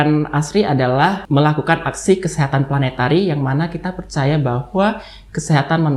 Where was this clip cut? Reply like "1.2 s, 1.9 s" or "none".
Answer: 1.2 s